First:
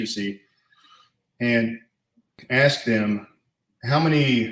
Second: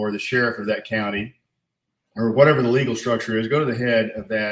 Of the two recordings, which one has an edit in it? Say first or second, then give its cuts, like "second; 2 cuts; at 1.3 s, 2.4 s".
first; 1 cut; at 2.4 s